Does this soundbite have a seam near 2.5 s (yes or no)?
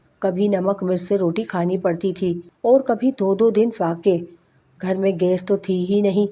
yes